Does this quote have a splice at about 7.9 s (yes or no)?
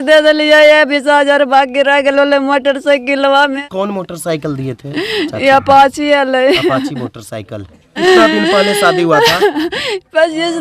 yes